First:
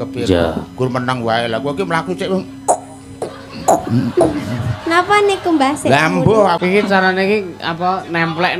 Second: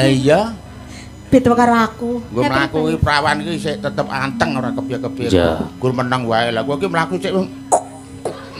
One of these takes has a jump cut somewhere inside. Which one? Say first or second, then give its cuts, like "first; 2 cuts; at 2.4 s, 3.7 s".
first; 1 cut; at 6.6 s